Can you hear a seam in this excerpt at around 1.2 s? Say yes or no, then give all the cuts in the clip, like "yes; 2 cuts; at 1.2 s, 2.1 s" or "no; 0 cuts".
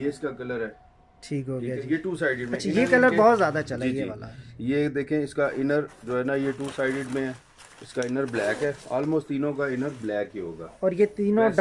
no; 0 cuts